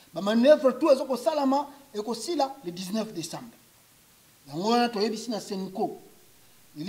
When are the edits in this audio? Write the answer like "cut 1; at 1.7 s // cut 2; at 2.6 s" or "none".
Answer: none